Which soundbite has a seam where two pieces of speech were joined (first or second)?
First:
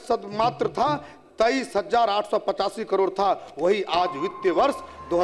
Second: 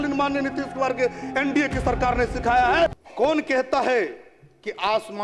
second